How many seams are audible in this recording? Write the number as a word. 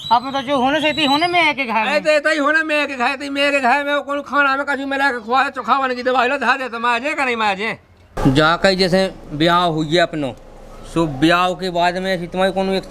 one